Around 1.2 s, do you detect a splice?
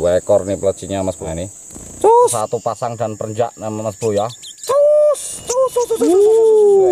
yes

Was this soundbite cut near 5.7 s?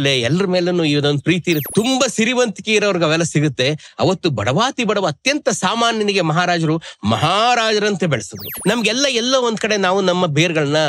no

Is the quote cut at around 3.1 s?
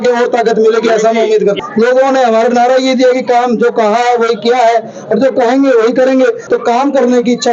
no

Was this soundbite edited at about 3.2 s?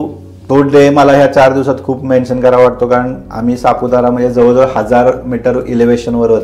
no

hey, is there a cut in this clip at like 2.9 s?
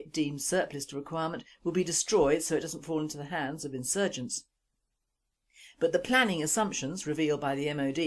yes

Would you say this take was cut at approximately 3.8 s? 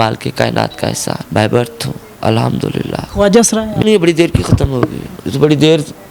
yes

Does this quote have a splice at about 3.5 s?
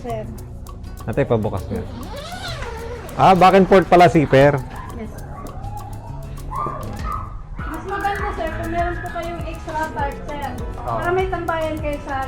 no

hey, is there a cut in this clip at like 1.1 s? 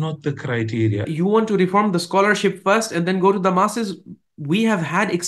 yes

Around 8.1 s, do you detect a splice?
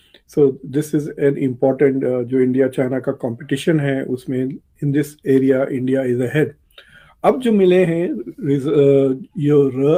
no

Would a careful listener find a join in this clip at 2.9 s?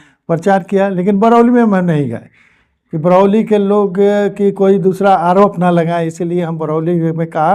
no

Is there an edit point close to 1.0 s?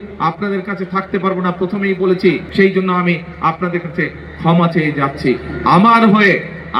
no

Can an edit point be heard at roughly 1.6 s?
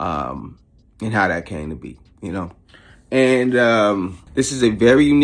no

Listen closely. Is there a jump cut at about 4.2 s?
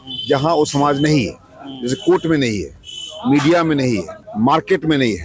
yes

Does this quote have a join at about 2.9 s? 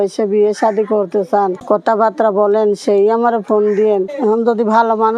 no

